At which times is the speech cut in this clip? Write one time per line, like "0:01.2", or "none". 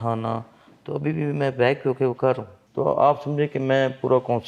0:02.6